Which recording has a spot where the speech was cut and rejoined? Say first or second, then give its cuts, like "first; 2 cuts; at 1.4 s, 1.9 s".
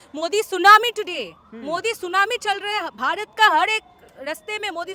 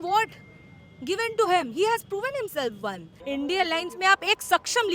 second; 1 cut; at 3.1 s